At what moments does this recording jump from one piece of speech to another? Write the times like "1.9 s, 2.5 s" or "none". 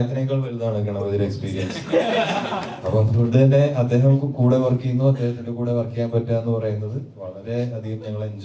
none